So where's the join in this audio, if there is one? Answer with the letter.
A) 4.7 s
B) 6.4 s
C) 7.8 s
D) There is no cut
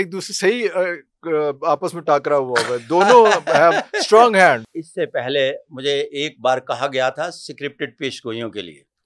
A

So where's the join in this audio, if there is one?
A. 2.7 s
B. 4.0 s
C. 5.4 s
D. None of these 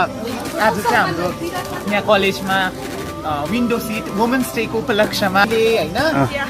C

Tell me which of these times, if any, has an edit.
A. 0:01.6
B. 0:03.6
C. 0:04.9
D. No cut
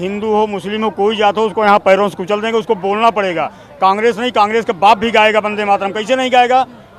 D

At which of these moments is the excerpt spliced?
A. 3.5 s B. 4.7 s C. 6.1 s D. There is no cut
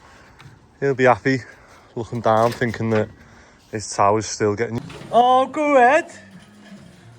B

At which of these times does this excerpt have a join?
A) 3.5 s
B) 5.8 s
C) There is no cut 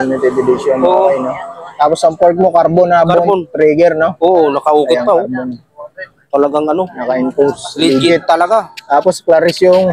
C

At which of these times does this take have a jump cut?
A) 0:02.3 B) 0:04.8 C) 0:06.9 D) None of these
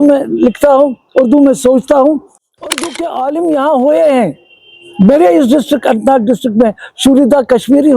A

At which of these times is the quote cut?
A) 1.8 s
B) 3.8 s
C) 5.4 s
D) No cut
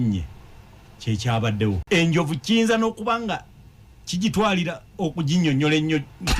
A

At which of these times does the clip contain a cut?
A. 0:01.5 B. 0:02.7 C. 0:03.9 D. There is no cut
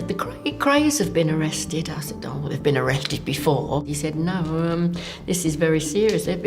C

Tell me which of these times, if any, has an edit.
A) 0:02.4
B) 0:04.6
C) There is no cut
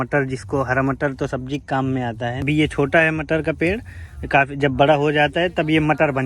A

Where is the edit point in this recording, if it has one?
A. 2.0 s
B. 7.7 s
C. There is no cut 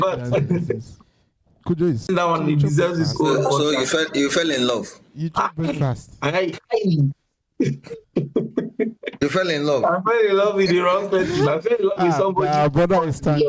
A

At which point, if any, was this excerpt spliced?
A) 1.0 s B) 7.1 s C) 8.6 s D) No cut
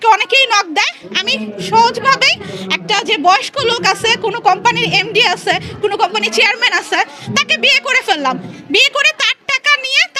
D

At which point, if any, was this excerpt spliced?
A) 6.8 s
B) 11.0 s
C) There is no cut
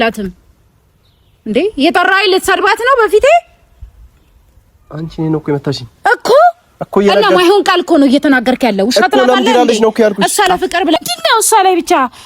B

